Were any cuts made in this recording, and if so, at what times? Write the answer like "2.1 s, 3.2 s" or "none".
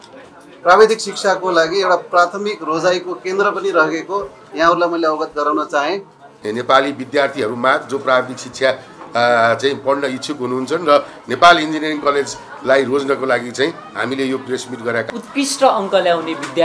6.3 s, 15.0 s

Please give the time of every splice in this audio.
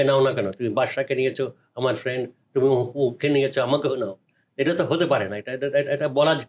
none

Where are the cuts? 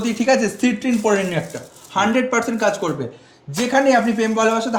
none

